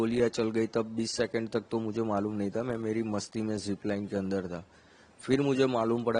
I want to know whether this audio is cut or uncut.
uncut